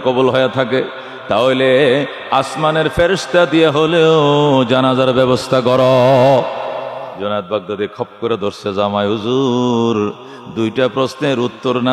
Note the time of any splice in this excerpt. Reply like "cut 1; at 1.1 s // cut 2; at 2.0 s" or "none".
cut 1; at 7.1 s